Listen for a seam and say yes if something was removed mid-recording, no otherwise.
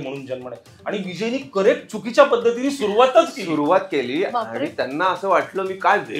no